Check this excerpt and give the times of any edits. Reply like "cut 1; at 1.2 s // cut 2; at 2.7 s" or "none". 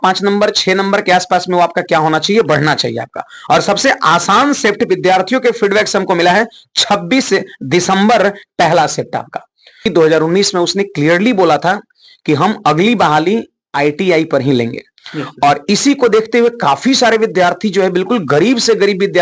cut 1; at 9.8 s

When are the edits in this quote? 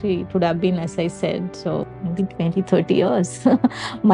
cut 1; at 1.9 s

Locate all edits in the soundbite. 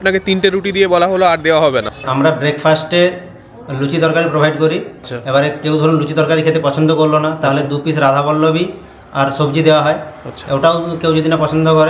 cut 1; at 2.1 s // cut 2; at 4.9 s

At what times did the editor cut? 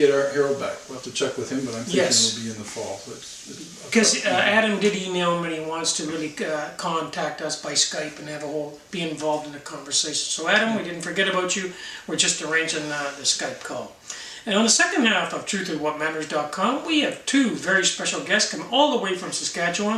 cut 1; at 1.7 s

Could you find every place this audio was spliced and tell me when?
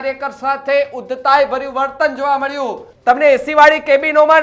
cut 1; at 2.8 s

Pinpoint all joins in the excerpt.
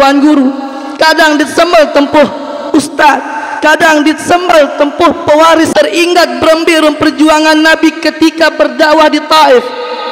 cut 1; at 5.7 s

